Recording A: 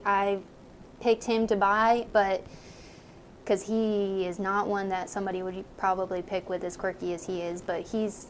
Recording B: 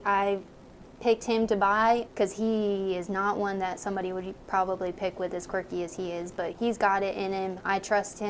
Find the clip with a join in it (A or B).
B